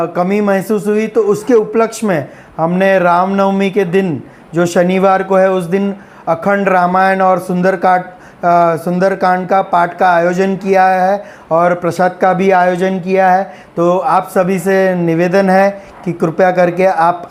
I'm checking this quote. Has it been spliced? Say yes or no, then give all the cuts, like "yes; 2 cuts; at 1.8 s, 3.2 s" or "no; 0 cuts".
no; 0 cuts